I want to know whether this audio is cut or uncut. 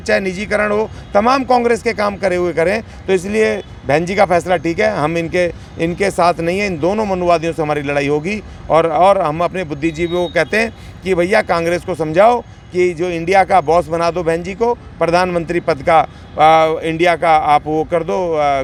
uncut